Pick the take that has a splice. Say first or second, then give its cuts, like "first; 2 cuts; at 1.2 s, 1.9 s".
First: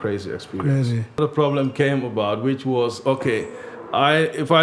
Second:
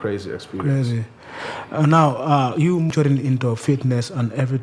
first; 1 cut; at 1.2 s